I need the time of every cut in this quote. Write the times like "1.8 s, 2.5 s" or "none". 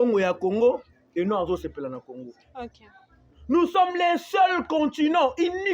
none